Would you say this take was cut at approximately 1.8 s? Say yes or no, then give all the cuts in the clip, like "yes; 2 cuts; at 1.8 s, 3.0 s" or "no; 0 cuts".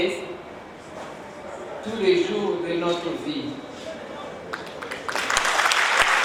no; 0 cuts